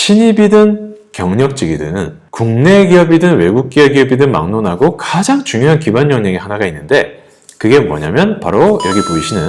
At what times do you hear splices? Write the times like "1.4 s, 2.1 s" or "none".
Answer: none